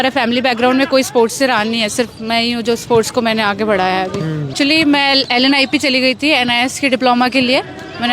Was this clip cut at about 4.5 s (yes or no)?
yes